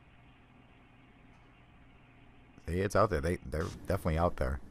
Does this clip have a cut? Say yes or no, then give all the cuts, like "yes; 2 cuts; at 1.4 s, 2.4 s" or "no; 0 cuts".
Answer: no; 0 cuts